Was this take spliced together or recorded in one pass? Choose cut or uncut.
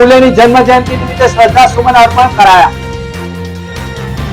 uncut